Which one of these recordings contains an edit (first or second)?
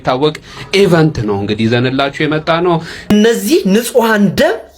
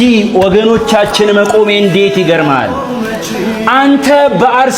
first